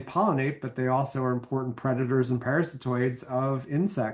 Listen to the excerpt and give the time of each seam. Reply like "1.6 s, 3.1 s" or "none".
none

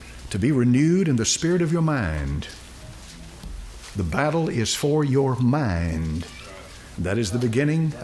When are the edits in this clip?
none

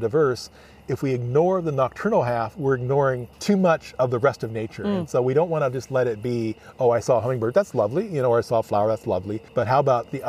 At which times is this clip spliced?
3.4 s, 9.4 s

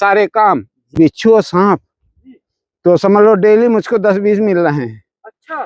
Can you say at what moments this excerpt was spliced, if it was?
0.9 s

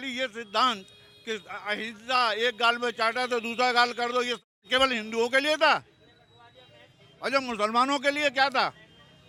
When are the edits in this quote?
none

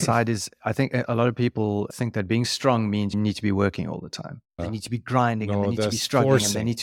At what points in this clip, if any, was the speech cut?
3.1 s, 4.6 s

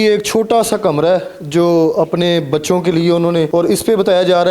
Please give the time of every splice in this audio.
3.5 s

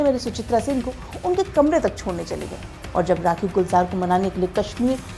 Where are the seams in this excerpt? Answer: 2.7 s

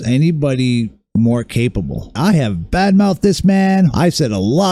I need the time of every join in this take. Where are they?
none

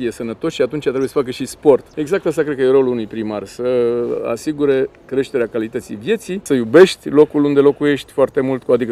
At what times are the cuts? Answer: 1.9 s, 6.4 s

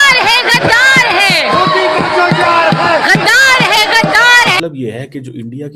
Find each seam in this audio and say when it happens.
4.6 s

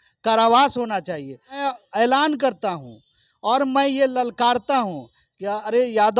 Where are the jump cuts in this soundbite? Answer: 1.5 s

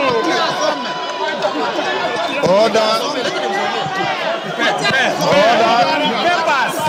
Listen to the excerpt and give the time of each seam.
none

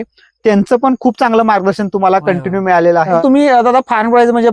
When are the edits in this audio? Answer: 3.1 s

